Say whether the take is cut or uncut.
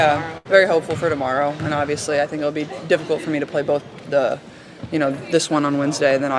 uncut